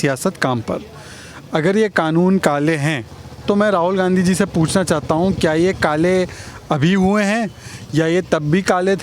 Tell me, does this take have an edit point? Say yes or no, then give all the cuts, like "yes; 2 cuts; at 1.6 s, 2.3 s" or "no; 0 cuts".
no; 0 cuts